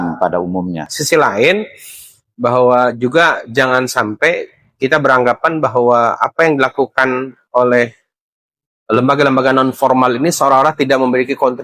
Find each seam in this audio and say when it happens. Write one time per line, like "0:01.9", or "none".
0:00.9